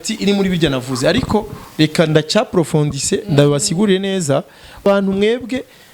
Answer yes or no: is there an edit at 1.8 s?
no